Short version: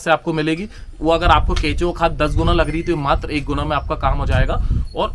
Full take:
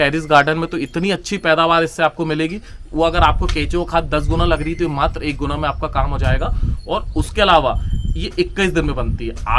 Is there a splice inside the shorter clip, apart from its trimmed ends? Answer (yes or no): no